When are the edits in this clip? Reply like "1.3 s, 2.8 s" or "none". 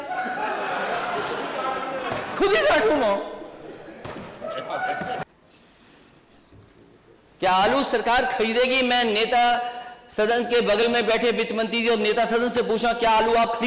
5.2 s